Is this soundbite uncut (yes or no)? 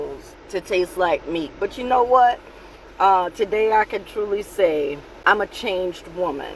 no